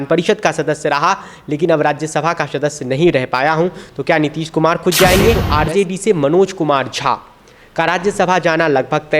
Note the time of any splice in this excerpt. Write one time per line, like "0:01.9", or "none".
0:05.4